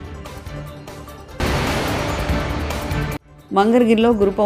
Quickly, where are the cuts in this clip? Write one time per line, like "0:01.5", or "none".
0:01.4
0:03.3